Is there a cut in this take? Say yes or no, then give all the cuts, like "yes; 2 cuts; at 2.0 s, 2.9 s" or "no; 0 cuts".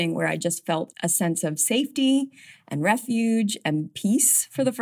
yes; 2 cuts; at 0.9 s, 3.9 s